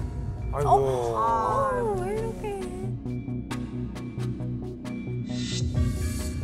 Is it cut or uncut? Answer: uncut